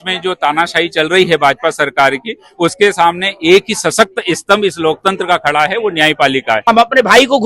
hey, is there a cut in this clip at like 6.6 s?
yes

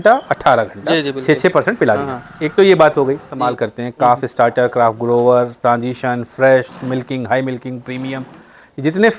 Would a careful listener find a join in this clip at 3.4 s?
yes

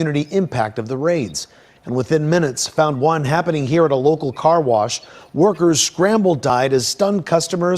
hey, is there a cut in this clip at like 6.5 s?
yes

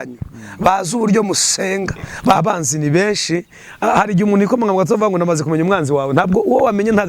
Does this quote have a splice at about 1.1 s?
no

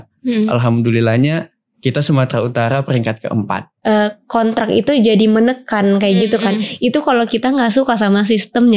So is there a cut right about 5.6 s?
no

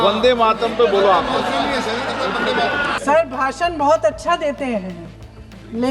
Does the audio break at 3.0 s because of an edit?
yes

